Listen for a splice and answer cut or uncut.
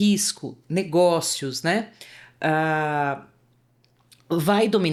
uncut